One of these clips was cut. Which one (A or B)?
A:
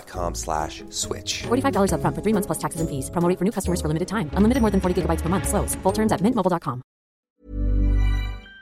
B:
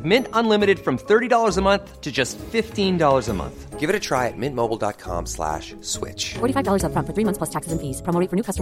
A